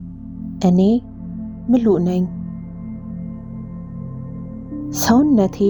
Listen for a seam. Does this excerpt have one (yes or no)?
yes